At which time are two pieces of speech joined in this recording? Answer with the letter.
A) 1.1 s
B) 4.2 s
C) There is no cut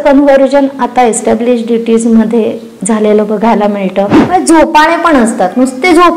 B